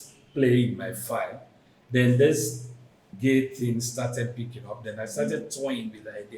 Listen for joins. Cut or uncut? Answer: cut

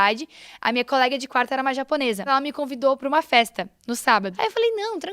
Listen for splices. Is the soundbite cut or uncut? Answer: cut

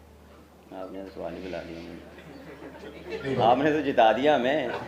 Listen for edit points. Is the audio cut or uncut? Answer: uncut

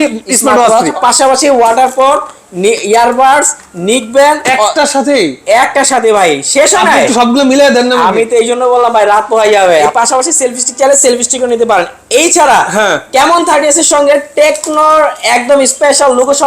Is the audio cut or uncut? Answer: cut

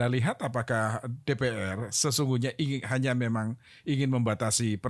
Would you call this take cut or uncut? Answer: uncut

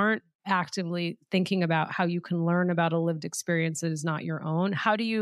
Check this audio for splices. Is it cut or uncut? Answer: uncut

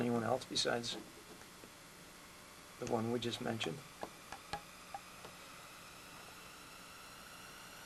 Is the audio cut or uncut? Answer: uncut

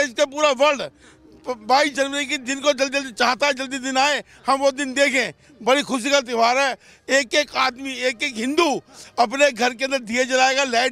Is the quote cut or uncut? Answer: uncut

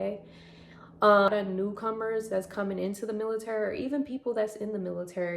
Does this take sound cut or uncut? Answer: cut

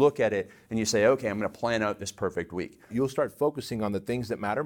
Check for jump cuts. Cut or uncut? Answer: cut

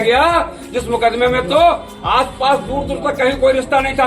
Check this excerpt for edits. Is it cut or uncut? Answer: uncut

